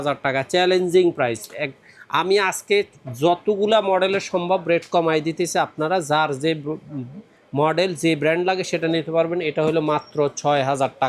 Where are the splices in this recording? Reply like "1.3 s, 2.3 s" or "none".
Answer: none